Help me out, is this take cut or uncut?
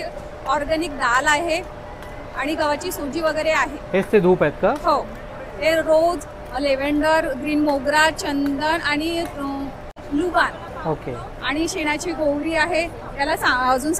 uncut